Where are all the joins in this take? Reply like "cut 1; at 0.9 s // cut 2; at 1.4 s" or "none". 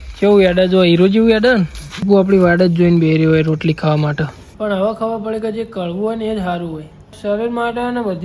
cut 1; at 2.0 s // cut 2; at 4.4 s // cut 3; at 7.2 s